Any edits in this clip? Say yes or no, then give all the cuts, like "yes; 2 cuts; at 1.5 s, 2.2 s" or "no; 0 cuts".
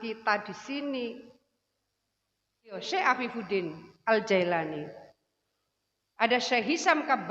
yes; 1 cut; at 2.8 s